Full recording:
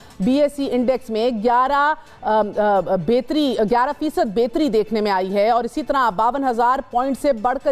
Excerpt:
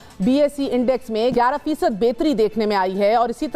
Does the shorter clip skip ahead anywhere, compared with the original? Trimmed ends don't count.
yes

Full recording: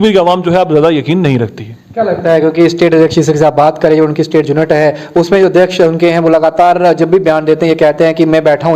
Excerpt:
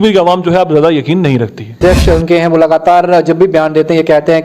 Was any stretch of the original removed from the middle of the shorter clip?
yes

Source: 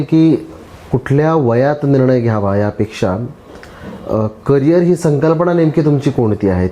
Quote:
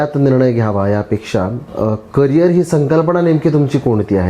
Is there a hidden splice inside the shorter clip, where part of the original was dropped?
yes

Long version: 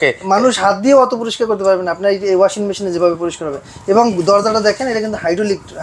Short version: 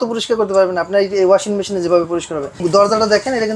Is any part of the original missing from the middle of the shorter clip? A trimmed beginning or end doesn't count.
yes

